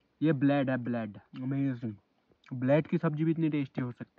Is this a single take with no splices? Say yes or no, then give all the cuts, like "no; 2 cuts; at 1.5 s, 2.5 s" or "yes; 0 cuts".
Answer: no; 1 cut; at 1.2 s